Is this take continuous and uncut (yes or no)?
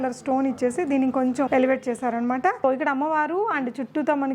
no